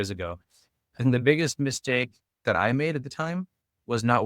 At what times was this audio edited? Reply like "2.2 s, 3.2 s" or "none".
2.4 s